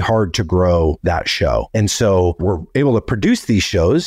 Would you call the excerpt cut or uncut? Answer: cut